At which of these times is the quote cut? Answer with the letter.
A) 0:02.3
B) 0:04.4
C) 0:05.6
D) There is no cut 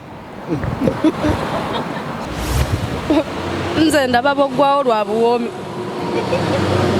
A